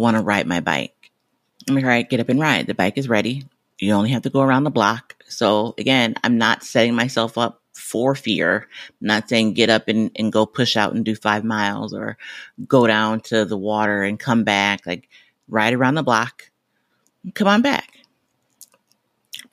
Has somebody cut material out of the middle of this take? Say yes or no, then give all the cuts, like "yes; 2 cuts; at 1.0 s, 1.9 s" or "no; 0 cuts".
no; 0 cuts